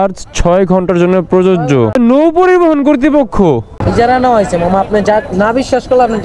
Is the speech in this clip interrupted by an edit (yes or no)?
yes